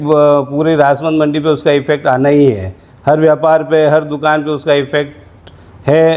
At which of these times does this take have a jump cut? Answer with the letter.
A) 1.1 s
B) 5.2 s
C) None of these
C